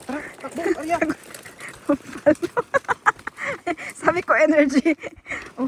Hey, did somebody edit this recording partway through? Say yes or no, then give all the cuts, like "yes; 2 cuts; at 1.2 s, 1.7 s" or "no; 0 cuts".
no; 0 cuts